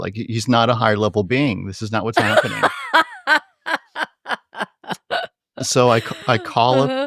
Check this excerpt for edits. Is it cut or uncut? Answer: uncut